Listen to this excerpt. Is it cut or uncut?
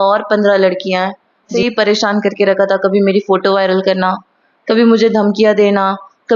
cut